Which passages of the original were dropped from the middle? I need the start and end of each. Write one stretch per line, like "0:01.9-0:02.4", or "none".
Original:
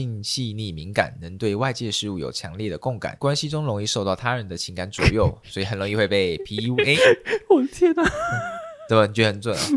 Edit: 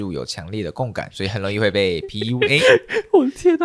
0:03.1-0:05.4